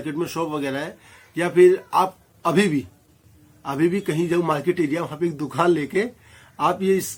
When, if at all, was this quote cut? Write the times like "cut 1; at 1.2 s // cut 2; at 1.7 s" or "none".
none